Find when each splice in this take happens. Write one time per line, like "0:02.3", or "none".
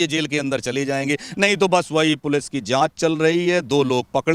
none